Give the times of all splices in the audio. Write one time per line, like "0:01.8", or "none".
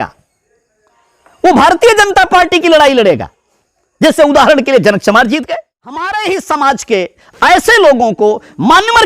0:05.5